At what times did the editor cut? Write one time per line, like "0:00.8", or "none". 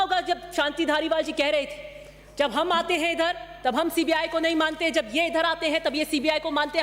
none